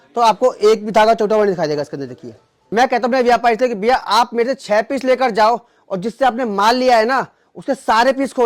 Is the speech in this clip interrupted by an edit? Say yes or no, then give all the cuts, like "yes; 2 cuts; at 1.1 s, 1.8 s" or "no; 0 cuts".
yes; 1 cut; at 2.6 s